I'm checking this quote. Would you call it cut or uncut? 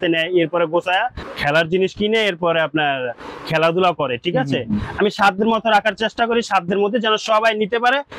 cut